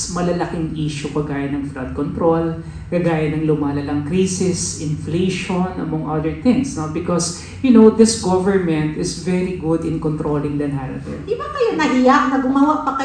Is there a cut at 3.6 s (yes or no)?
no